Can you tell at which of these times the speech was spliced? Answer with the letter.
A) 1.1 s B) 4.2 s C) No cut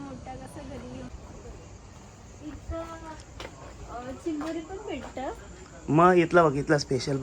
A